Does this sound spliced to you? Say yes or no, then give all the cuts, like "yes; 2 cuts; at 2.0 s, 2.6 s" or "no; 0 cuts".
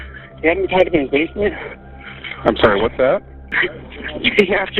yes; 1 cut; at 3.5 s